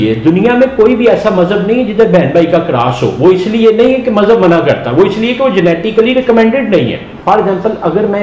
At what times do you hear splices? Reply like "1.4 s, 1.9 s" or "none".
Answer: 7.1 s